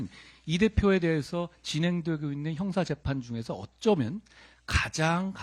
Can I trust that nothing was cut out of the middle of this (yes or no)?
yes